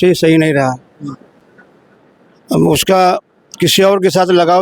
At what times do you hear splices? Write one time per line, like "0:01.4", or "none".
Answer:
none